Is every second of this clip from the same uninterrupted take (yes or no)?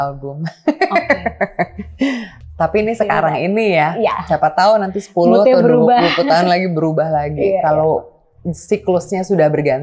yes